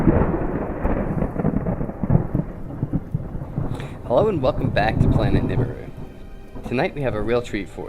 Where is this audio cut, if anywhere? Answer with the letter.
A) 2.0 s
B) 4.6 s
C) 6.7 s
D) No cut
A